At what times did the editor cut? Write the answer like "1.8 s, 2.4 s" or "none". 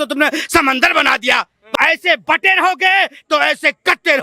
1.6 s